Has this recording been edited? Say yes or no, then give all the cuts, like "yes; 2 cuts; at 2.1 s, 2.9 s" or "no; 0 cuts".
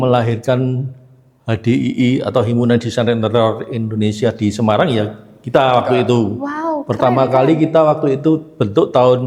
no; 0 cuts